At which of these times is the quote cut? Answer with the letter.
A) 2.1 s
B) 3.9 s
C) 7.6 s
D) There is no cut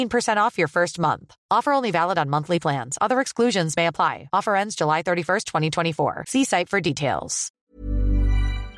C